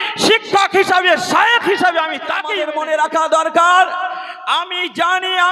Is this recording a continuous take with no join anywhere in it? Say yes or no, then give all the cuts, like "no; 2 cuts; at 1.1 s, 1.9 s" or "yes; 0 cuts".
no; 1 cut; at 2.6 s